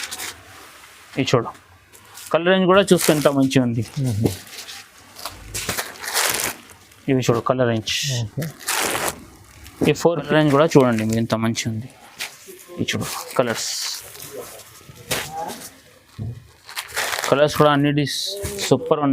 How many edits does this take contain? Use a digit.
1